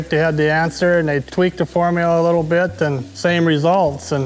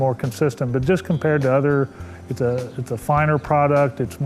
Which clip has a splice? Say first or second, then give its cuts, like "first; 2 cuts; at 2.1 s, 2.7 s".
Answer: first; 2 cuts; at 1.2 s, 3.1 s